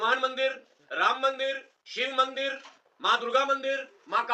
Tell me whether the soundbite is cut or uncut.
uncut